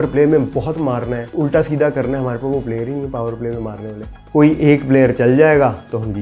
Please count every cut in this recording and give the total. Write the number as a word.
two